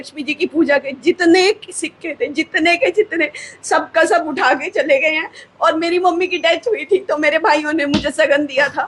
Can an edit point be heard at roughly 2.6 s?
no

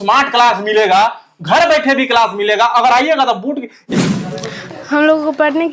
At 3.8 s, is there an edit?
yes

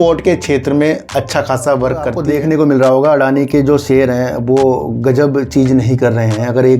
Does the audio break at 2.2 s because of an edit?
yes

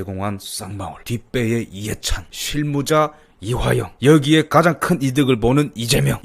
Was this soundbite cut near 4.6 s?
no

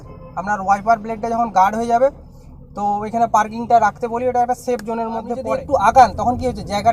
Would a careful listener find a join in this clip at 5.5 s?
yes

